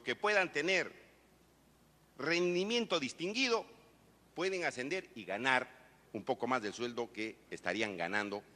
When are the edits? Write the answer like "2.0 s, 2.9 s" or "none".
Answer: none